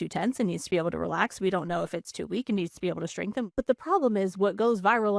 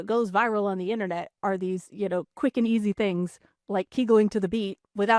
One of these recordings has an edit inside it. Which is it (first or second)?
first